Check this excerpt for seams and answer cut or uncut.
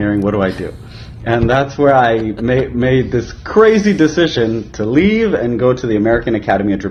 uncut